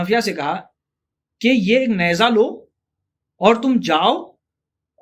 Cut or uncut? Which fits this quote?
uncut